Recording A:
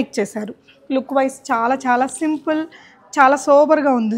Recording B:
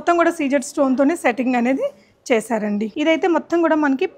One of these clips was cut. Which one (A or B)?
B